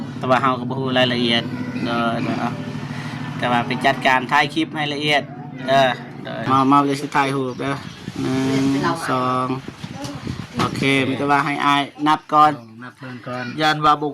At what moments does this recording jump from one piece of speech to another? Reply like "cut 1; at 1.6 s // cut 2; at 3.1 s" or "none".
cut 1; at 6.4 s